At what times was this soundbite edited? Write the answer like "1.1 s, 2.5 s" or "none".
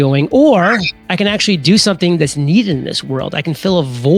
1.0 s